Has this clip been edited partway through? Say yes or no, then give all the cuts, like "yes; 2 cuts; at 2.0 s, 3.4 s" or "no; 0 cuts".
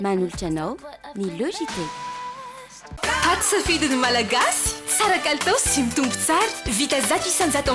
yes; 1 cut; at 2.8 s